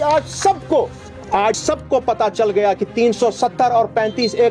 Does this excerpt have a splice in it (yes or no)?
yes